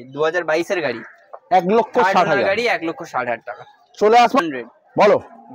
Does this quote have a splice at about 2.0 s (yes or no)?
no